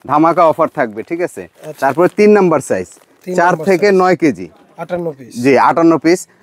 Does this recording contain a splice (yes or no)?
no